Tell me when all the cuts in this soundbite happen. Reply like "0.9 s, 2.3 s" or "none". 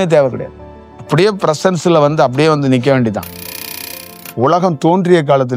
3.9 s